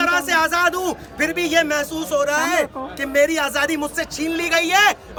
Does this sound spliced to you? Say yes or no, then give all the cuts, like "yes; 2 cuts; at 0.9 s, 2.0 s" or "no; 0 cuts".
no; 0 cuts